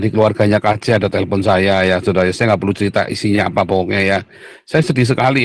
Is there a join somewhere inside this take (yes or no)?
no